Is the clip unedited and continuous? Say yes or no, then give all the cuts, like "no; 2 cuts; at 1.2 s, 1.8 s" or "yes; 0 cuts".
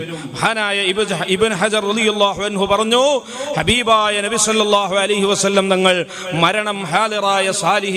yes; 0 cuts